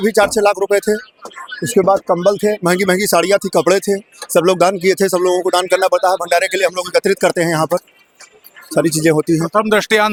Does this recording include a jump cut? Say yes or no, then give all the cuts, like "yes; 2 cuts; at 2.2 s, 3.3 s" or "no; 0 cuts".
no; 0 cuts